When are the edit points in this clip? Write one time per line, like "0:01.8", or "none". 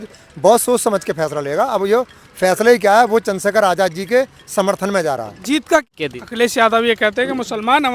0:05.8